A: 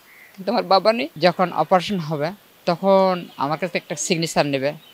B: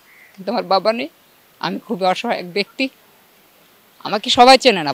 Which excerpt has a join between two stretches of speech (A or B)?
A